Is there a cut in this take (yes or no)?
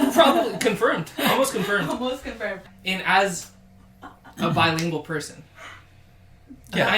yes